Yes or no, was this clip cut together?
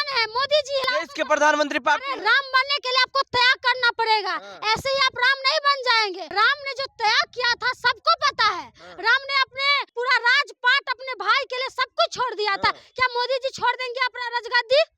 yes